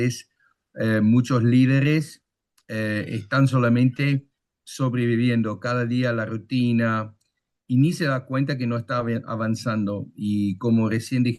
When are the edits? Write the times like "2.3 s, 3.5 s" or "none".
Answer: none